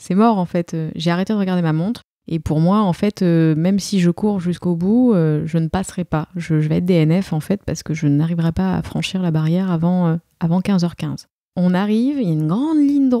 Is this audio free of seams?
no; 2 cuts; at 2.1 s, 11.4 s

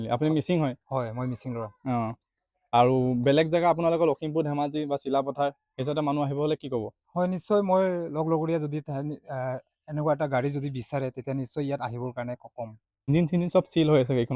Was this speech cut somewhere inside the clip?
yes; 1 cut; at 13.1 s

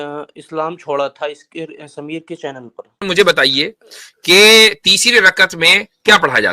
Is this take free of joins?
no; 1 cut; at 3.1 s

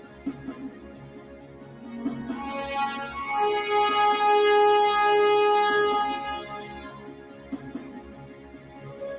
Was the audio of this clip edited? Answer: yes; 1 cut; at 7.8 s

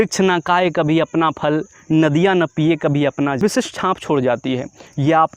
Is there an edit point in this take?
yes; 1 cut; at 3.4 s

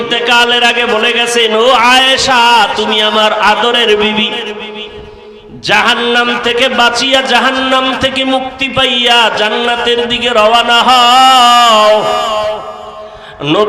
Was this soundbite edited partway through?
no; 0 cuts

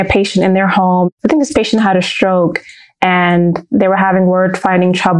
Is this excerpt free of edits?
no; 1 cut; at 1.1 s

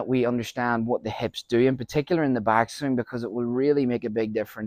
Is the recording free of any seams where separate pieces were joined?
yes; 0 cuts

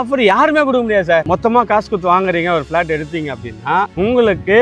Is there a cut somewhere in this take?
yes; 1 cut; at 1.3 s

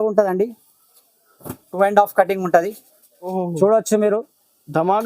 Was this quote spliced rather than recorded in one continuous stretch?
yes; 1 cut; at 3.3 s

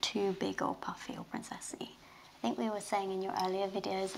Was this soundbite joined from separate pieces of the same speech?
yes; 1 cut; at 2.0 s

